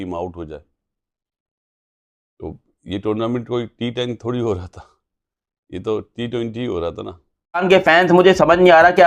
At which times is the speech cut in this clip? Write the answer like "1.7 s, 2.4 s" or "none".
7.6 s